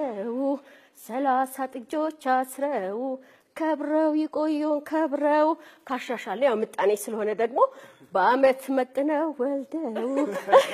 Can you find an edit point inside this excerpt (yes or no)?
yes